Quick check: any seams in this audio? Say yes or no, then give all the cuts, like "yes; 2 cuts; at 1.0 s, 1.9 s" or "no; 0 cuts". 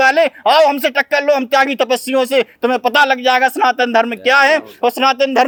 no; 0 cuts